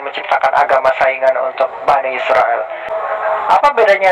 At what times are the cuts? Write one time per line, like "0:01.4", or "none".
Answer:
0:02.9